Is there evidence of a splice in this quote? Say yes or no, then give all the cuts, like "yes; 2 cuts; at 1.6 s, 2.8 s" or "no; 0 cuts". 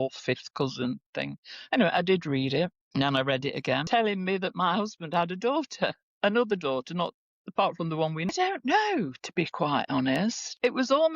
yes; 2 cuts; at 3.8 s, 8.3 s